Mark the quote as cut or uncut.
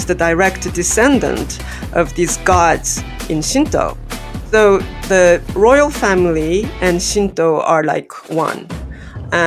uncut